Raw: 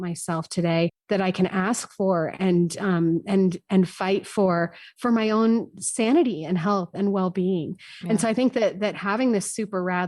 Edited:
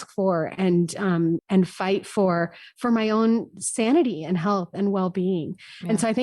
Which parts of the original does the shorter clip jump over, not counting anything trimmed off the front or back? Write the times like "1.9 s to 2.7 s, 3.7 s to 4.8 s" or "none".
3.2 s to 3.6 s